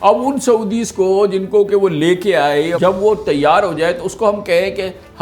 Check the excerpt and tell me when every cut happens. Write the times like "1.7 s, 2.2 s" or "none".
2.8 s